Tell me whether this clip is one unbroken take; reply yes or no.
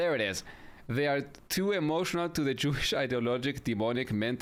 yes